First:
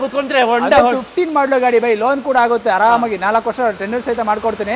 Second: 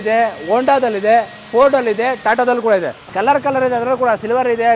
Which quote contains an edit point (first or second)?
second